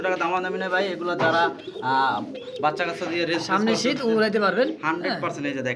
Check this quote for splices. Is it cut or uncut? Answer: uncut